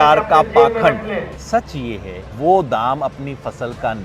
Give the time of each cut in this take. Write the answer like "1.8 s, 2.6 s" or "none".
1.4 s, 2.2 s